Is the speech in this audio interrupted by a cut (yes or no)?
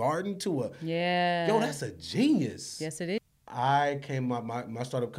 yes